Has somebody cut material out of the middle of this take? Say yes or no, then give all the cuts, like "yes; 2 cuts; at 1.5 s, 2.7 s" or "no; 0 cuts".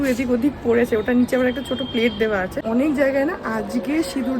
yes; 1 cut; at 2.6 s